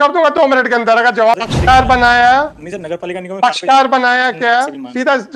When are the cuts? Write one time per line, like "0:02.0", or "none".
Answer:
0:01.4